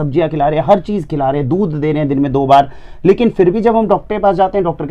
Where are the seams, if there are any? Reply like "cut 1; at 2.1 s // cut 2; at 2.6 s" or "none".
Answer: none